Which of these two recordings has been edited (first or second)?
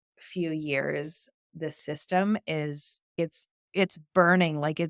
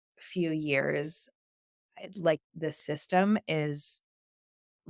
first